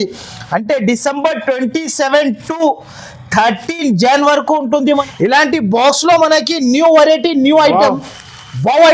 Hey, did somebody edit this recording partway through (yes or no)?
yes